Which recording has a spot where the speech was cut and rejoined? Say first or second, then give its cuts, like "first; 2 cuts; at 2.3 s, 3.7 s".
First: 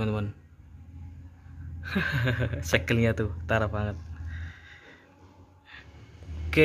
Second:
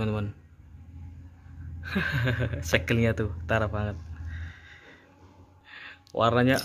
first; 1 cut; at 5.6 s